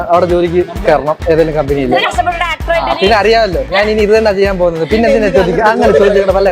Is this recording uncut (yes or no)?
yes